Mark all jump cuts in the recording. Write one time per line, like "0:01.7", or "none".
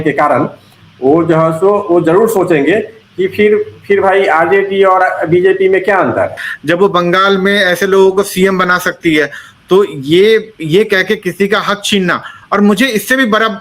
0:06.5

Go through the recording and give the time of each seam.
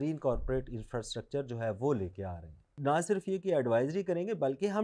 0:02.7

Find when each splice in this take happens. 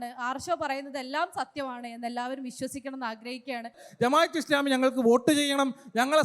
0:03.8

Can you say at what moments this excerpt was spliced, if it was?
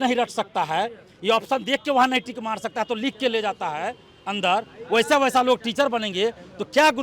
none

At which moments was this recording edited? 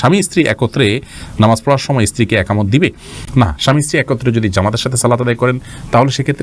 none

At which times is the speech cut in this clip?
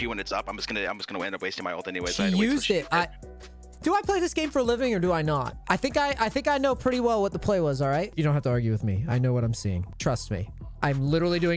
0:05.5
0:08.1
0:09.9

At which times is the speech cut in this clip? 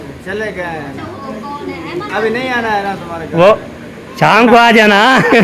0:01.2

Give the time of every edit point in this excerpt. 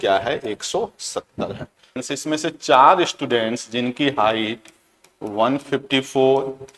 0:02.0

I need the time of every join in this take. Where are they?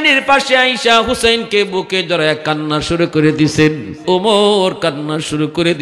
0:03.9

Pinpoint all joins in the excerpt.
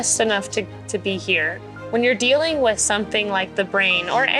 0:01.6

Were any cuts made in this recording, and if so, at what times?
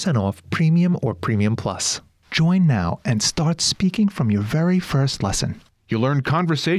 0:01.9

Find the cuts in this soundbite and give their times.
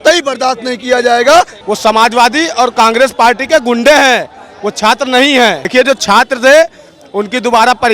0:01.6
0:05.6

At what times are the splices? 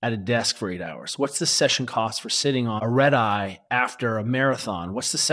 0:02.8

